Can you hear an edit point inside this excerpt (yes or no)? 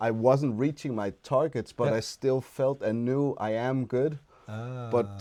no